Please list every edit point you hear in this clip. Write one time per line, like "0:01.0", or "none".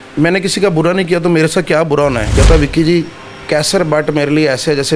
0:02.3